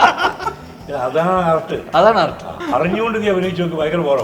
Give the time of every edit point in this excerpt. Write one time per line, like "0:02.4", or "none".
0:02.5